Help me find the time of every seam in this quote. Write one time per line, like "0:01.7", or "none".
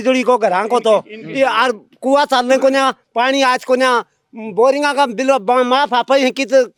none